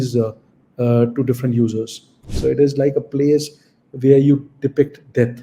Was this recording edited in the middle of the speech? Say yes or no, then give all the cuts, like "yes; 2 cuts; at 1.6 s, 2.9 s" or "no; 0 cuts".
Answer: yes; 1 cut; at 2.2 s